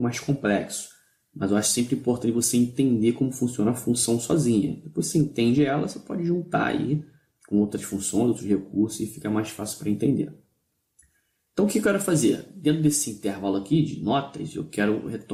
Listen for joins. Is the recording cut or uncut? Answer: uncut